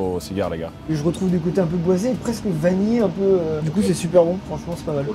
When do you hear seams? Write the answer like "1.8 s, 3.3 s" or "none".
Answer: 0.9 s, 3.6 s

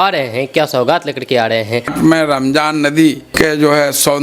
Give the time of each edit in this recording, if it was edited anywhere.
1.9 s, 3.3 s

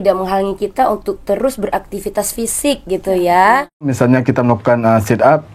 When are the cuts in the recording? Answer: 3.9 s

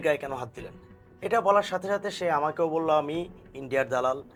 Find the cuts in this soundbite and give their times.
none

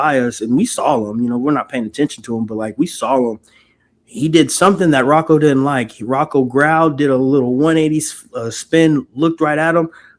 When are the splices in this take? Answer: none

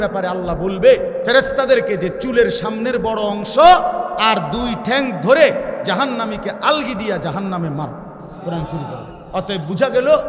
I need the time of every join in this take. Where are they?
1.2 s, 4.2 s, 5.9 s, 8.3 s

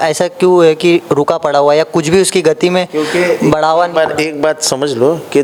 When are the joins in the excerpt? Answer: none

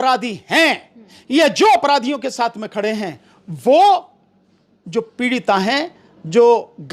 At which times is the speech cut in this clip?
none

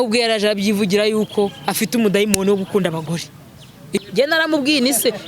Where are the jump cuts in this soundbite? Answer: 3.9 s

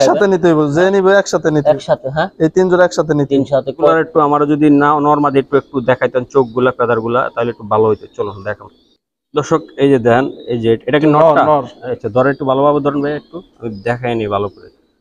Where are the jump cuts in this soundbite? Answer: 3.9 s

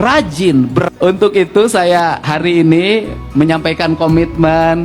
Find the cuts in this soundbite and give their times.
0.9 s

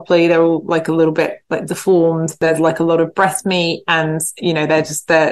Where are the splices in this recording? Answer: 2.4 s

